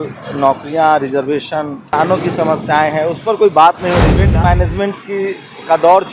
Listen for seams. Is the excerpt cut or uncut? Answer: cut